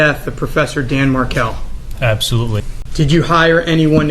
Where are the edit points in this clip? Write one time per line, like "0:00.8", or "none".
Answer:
0:02.8